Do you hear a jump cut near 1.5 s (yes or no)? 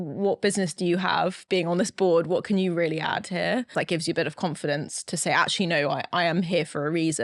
no